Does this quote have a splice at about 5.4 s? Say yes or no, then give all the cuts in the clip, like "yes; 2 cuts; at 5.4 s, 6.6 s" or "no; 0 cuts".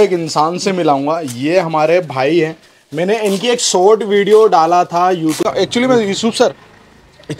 yes; 1 cut; at 5.4 s